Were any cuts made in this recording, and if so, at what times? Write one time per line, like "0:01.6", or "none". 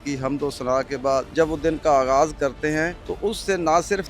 0:01.3
0:03.0